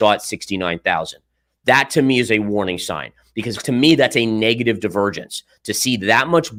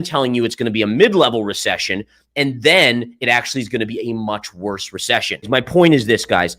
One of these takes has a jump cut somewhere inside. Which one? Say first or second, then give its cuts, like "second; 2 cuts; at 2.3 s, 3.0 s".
second; 1 cut; at 5.5 s